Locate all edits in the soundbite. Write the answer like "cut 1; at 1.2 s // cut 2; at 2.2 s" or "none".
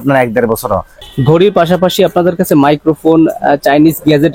cut 1; at 1.0 s